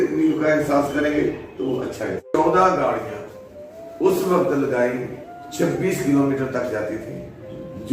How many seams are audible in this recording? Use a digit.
1